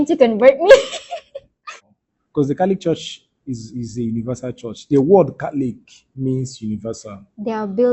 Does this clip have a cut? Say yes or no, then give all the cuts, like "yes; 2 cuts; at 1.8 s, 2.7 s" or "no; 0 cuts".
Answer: yes; 1 cut; at 1.7 s